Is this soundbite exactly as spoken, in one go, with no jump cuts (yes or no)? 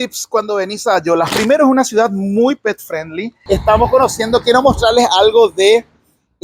no